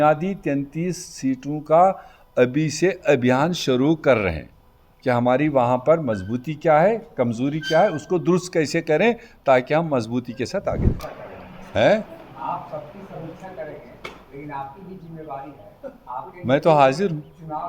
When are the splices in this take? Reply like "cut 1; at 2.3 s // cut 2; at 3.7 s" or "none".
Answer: cut 1; at 10.9 s